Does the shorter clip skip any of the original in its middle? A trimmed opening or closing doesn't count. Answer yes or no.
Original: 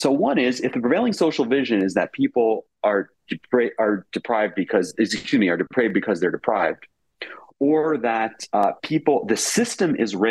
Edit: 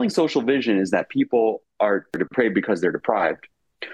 yes